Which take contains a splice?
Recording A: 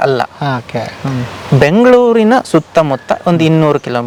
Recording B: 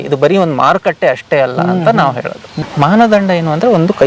B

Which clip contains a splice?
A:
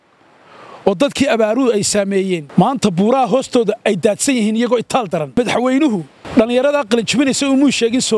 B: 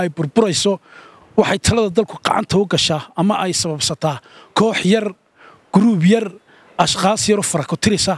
A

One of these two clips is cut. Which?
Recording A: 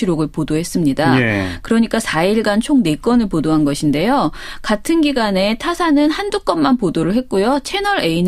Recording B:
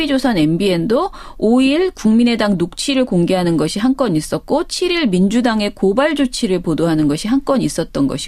B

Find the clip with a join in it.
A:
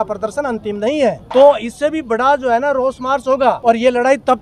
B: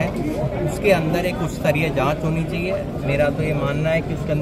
A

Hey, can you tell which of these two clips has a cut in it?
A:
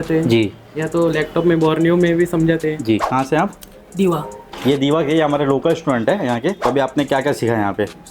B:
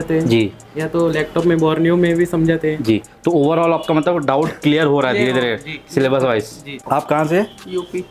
A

